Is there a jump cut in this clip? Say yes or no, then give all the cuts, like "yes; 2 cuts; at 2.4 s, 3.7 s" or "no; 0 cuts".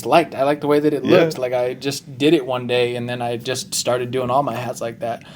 no; 0 cuts